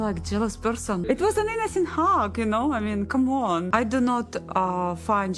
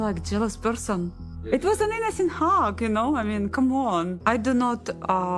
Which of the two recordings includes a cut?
first; 2 cuts; at 1.0 s, 3.7 s

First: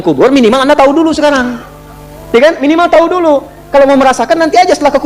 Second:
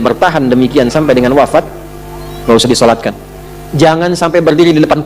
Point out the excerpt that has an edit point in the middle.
second; 1 cut; at 3.6 s

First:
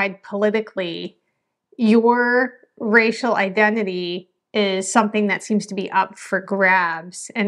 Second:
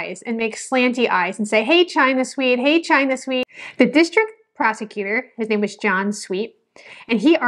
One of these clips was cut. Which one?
second; 1 cut; at 3.5 s

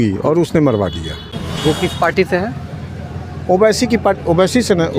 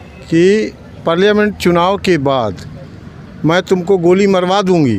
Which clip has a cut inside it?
first; 1 cut; at 1.3 s

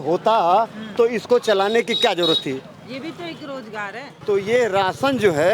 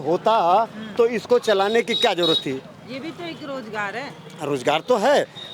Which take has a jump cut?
first; 1 cut; at 4.1 s

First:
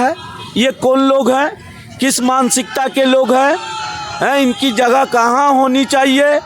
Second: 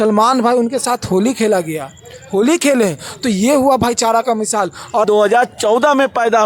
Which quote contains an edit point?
second; 1 cut; at 5.0 s

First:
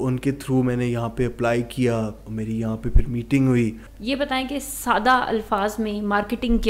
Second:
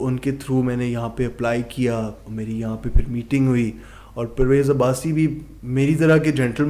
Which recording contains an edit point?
first; 1 cut; at 3.9 s

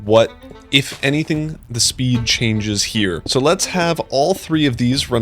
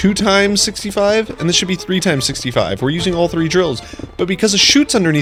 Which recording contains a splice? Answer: first; 1 cut; at 3.2 s

